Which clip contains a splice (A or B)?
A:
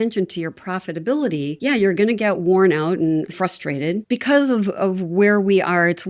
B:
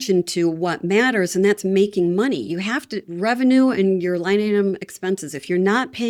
A